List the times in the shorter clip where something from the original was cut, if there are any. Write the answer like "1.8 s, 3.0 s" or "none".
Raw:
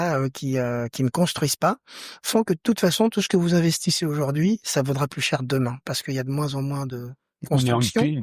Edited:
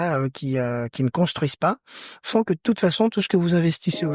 none